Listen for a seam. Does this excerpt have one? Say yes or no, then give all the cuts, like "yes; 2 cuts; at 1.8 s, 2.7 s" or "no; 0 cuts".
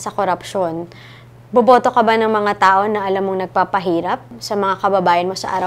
yes; 1 cut; at 4.3 s